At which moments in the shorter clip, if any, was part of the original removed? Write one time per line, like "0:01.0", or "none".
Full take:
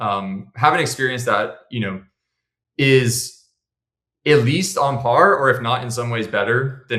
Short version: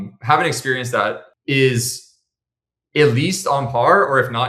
0:01.3